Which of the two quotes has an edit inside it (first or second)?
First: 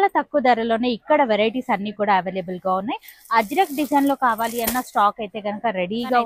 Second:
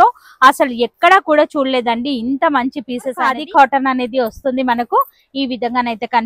second